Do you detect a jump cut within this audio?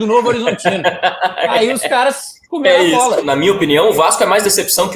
yes; 1 cut; at 3.2 s

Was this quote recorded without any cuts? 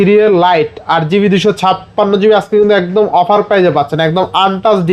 yes; 0 cuts

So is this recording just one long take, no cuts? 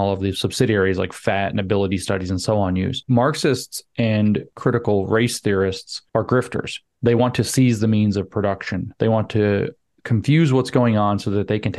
no; 3 cuts; at 3.0 s, 4.5 s, 5.9 s

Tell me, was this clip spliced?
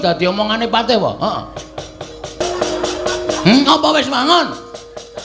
yes; 1 cut; at 2.4 s

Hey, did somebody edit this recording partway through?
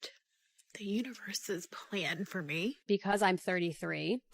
yes; 1 cut; at 2.8 s

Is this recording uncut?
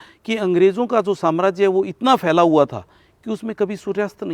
yes; 0 cuts

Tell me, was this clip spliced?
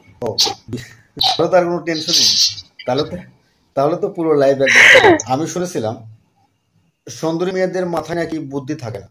yes; 2 cuts; at 1.4 s, 5.2 s

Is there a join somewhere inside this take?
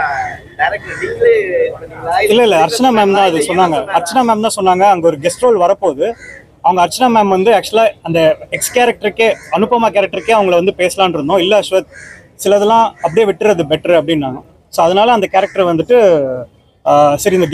no; 0 cuts

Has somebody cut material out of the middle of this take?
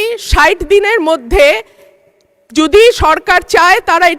no; 0 cuts

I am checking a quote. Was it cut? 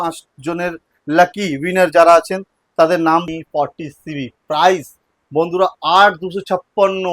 yes; 1 cut; at 3.3 s

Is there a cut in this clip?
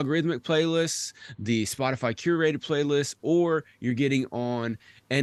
no; 0 cuts

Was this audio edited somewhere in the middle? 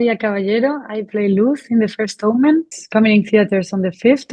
yes; 1 cut; at 2.8 s

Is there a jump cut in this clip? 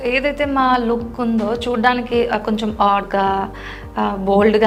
no; 0 cuts

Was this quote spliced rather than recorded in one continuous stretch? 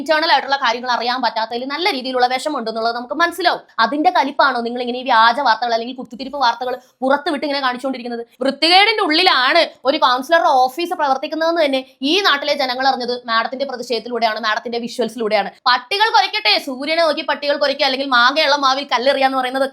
yes; 3 cuts; at 3.7 s, 8.3 s, 15.5 s

